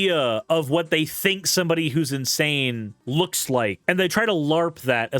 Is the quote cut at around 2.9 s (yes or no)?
yes